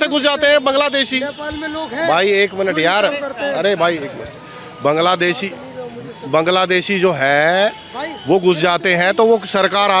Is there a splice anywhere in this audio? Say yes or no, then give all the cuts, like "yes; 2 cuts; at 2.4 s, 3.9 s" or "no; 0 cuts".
no; 0 cuts